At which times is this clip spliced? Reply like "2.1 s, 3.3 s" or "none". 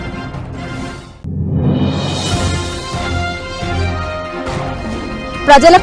1.1 s